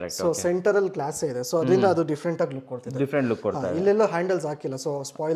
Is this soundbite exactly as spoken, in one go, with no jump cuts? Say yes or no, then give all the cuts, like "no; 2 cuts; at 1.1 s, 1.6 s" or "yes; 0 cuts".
yes; 0 cuts